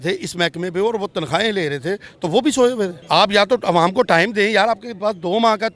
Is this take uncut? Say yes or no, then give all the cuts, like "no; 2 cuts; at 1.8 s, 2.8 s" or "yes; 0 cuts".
no; 1 cut; at 3.0 s